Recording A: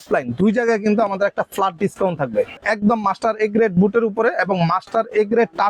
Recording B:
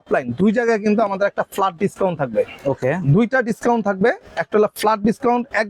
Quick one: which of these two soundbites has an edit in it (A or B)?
A